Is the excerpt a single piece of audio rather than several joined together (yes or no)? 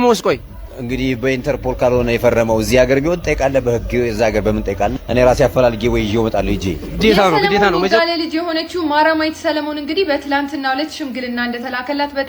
no